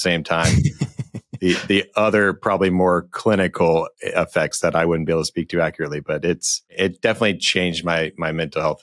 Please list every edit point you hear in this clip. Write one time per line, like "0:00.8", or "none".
0:06.8